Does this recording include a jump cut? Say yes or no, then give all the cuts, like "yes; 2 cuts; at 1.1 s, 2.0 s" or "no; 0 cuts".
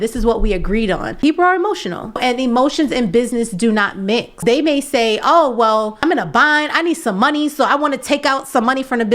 yes; 4 cuts; at 1.1 s, 2.2 s, 4.4 s, 6.0 s